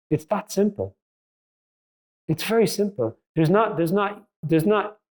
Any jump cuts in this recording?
no; 0 cuts

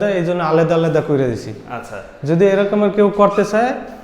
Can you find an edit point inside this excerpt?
no; 0 cuts

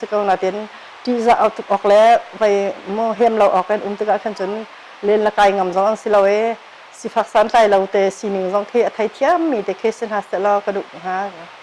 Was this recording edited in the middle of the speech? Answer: no; 0 cuts

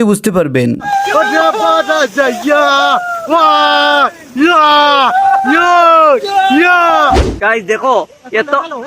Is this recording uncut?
no; 1 cut; at 7.1 s

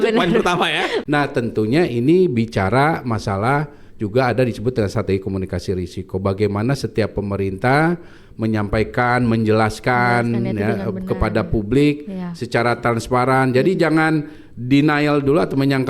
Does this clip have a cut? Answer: yes; 1 cut; at 1.0 s

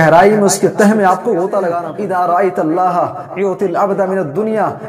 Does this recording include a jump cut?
yes; 1 cut; at 1.8 s

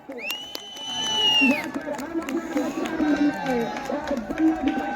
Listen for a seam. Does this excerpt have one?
yes; 1 cut; at 3.2 s

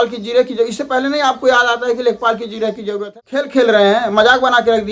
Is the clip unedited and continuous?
no; 1 cut; at 2.9 s

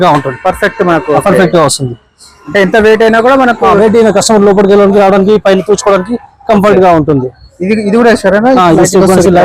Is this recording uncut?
yes; 0 cuts

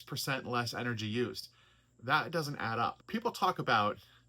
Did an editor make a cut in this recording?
yes; 1 cut; at 3.0 s

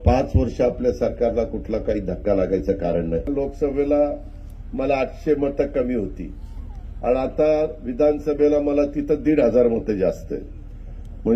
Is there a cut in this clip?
yes; 1 cut; at 3.3 s

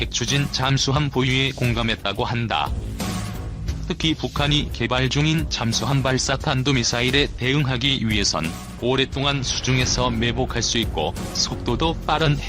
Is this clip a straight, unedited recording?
no; 1 cut; at 1.1 s

